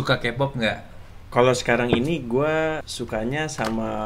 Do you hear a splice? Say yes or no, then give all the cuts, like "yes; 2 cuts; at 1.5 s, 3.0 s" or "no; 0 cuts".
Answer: yes; 2 cuts; at 0.9 s, 2.9 s